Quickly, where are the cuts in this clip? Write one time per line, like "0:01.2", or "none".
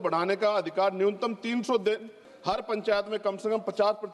0:02.3